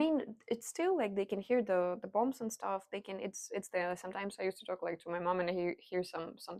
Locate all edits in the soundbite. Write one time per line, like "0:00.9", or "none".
none